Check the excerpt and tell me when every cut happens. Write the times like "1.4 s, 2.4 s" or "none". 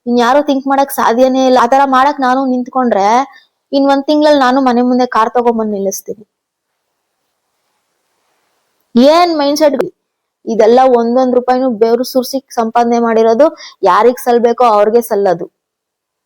1.6 s, 9.8 s